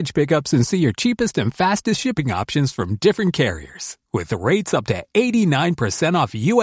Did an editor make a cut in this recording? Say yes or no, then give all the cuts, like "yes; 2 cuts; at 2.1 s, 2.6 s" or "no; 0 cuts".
no; 0 cuts